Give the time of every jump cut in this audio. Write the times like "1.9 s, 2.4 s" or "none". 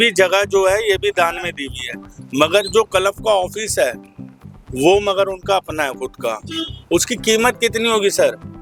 none

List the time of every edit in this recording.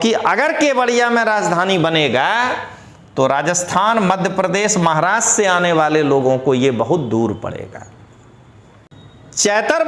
8.9 s

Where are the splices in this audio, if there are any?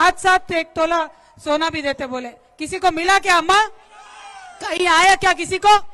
none

